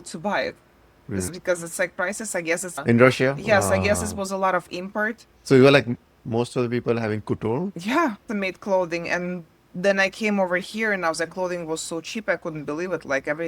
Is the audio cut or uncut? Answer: uncut